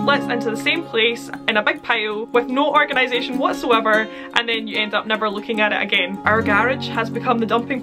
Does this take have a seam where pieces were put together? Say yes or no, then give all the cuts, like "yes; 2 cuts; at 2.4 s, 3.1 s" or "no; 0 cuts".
yes; 1 cut; at 6.1 s